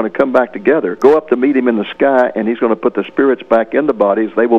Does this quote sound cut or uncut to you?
cut